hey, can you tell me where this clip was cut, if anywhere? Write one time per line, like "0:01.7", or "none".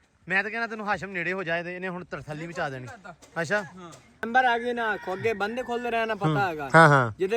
0:04.2